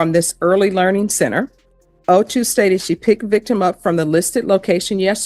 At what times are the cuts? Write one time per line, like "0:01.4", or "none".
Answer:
none